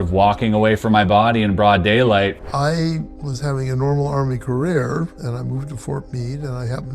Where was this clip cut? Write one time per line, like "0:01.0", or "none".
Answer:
0:02.4
0:03.2